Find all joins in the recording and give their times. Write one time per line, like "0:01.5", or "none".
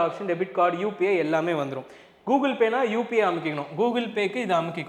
none